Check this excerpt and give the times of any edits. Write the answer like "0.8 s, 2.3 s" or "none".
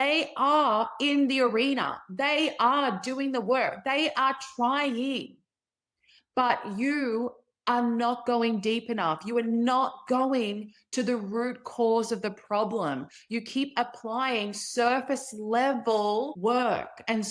16.3 s